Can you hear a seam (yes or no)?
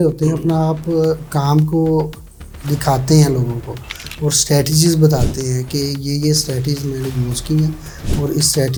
no